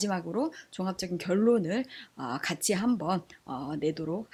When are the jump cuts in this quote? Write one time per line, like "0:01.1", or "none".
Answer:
none

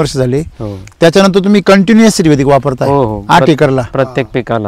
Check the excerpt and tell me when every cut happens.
none

